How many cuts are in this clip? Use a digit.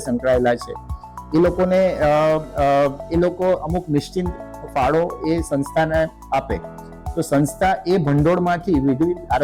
0